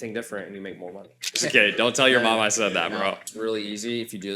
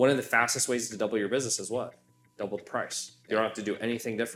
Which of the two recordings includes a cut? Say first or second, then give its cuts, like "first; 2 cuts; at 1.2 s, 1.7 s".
first; 2 cuts; at 1.3 s, 3.3 s